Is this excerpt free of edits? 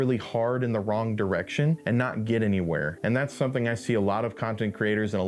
no; 2 cuts; at 1.8 s, 2.9 s

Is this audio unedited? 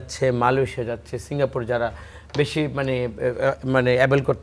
yes; 0 cuts

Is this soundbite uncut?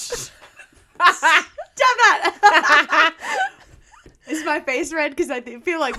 yes; 0 cuts

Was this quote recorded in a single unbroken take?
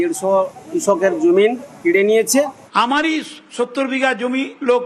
no; 1 cut; at 2.6 s

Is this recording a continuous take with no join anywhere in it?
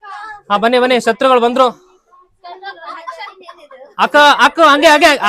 yes; 0 cuts

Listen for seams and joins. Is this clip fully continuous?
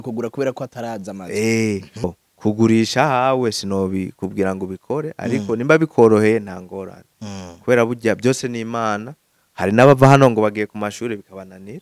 no; 1 cut; at 2.0 s

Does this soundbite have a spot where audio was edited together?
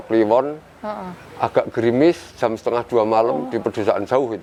no; 0 cuts

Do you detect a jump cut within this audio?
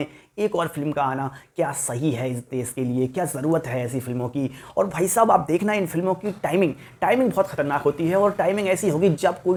no; 0 cuts

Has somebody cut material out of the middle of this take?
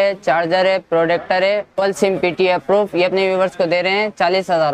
yes; 1 cut; at 1.8 s

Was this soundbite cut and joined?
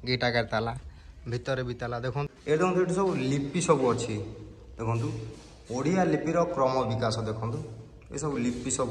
yes; 1 cut; at 2.3 s

